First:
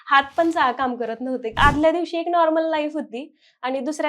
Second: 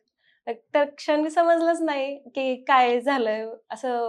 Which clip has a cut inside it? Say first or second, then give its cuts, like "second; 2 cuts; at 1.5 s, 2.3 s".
first; 1 cut; at 1.6 s